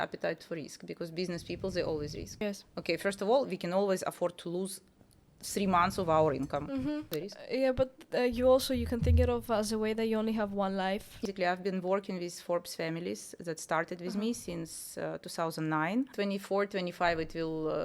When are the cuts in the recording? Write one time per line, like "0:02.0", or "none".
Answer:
0:02.4
0:07.1
0:11.2
0:16.1